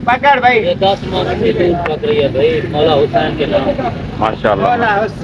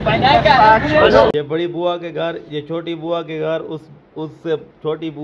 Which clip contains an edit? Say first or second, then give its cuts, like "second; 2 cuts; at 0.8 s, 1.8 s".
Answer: second; 1 cut; at 1.3 s